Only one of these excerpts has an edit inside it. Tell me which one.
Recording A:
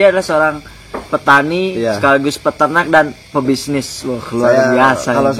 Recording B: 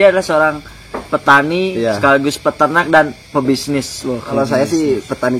B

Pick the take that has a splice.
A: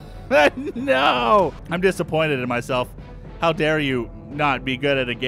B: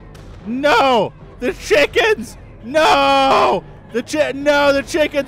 A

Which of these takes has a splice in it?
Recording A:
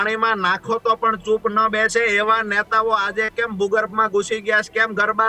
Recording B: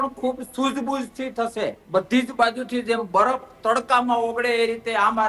B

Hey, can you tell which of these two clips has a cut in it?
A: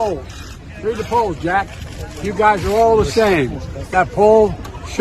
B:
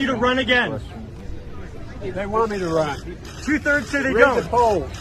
A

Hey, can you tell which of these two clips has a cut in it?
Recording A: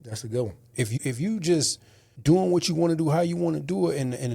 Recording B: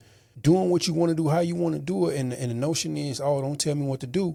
A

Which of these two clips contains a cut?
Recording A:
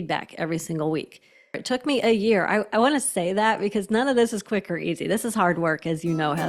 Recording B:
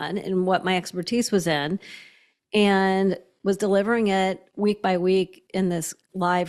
A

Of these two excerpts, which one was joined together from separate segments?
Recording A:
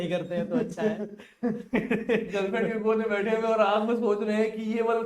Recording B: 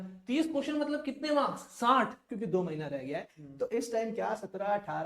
B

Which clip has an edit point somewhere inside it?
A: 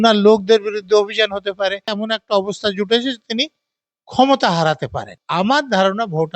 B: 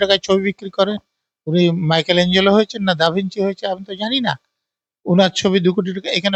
A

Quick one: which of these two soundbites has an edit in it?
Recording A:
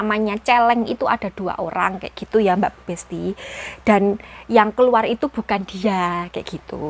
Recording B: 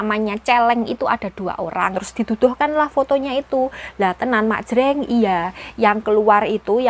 B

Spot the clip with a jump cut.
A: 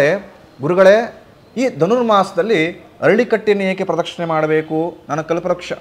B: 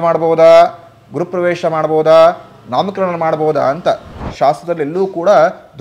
B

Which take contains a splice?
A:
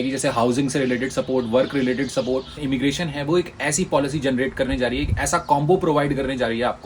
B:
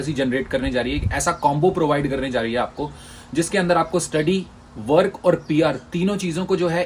A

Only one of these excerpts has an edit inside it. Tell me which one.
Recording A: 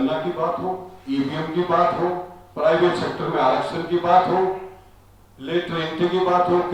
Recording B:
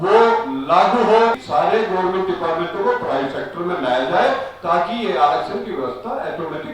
B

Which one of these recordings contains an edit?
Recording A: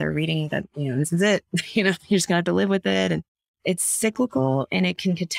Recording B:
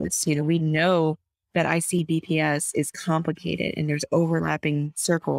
A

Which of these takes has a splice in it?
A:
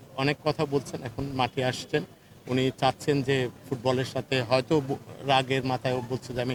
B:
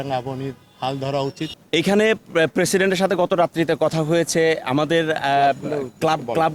B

